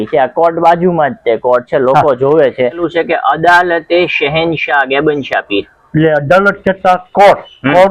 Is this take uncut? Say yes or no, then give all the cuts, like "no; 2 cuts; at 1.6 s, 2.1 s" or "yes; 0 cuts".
no; 1 cut; at 2.8 s